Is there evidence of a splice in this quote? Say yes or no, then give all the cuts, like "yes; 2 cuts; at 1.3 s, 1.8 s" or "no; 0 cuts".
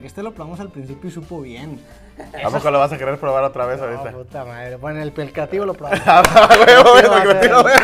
no; 0 cuts